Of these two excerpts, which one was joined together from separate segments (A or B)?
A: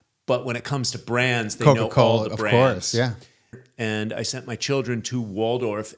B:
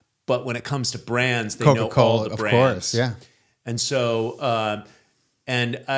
A